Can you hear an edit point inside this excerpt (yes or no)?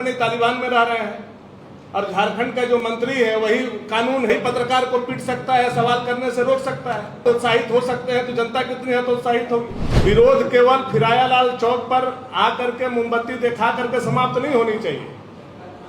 yes